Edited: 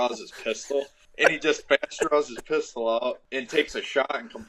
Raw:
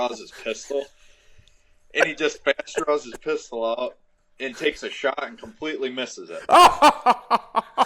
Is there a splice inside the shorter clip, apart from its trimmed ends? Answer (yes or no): yes